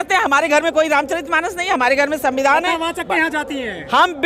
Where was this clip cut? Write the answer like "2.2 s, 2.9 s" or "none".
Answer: none